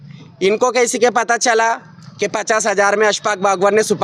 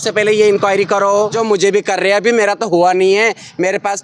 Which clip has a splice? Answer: second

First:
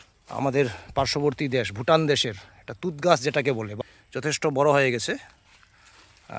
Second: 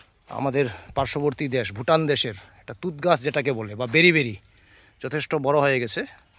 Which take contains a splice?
first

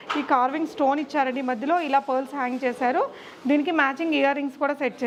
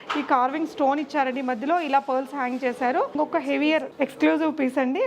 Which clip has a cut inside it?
second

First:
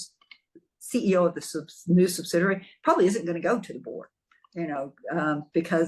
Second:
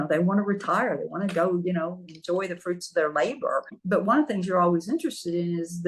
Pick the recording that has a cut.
second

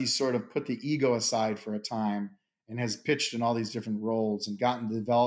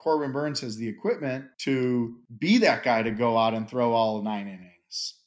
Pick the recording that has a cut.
second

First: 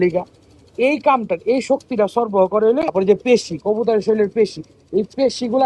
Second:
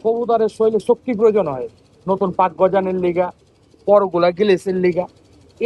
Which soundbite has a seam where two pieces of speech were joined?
first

